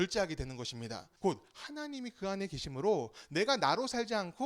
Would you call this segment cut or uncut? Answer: cut